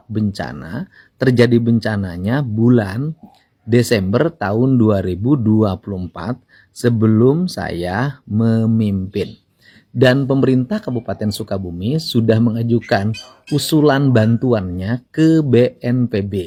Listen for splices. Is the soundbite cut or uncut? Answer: uncut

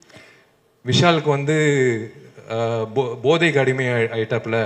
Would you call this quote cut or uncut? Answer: uncut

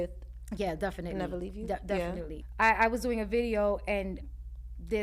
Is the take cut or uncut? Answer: cut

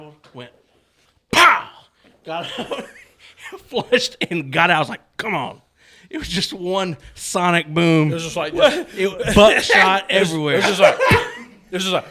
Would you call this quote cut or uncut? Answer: uncut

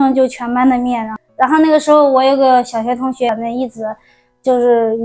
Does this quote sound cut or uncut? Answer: cut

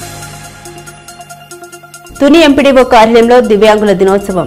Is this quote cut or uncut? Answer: cut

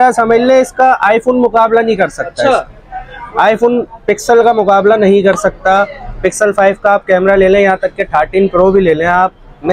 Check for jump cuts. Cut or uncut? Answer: uncut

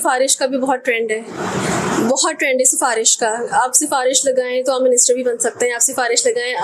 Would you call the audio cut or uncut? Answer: uncut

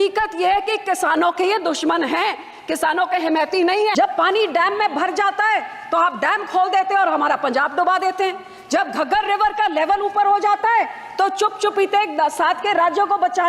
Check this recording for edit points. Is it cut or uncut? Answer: cut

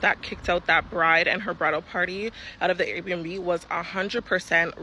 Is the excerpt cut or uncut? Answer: uncut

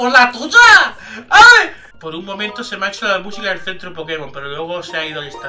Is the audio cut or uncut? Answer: cut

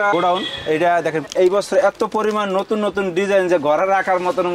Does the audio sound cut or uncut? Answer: cut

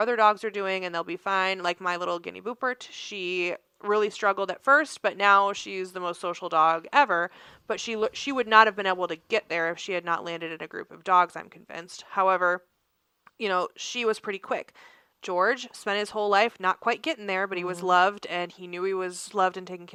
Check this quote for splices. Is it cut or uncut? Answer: uncut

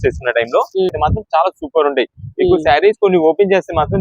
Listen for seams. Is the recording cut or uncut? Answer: cut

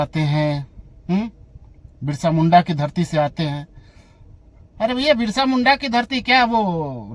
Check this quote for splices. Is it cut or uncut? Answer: uncut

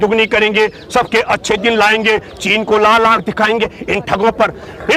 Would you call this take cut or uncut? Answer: uncut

